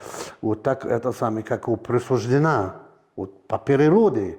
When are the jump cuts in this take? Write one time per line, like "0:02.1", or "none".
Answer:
none